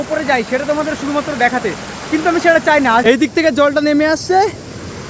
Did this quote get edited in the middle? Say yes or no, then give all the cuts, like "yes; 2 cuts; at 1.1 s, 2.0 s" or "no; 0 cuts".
yes; 1 cut; at 3.0 s